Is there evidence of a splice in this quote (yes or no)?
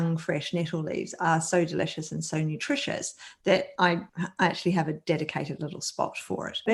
no